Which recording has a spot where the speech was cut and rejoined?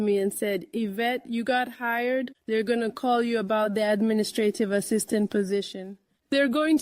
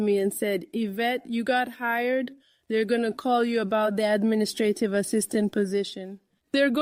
first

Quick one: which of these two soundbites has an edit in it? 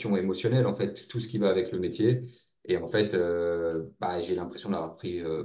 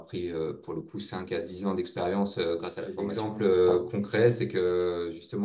second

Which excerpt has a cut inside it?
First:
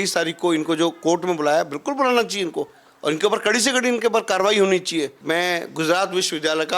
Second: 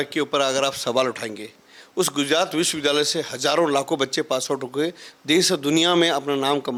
first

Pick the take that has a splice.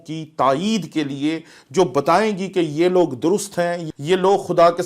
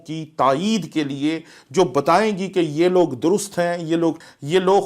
first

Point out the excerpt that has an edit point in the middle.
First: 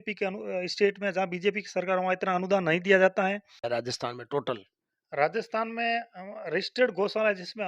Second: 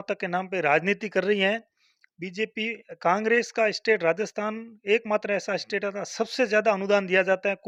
first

